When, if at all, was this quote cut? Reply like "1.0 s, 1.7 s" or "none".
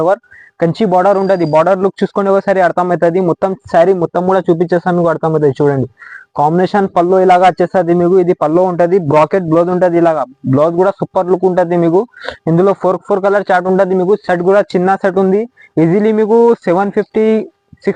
none